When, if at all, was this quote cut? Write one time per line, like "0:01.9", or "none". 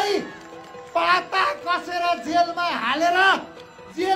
none